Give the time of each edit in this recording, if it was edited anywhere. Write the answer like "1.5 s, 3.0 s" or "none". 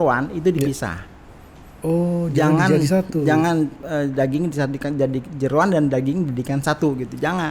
none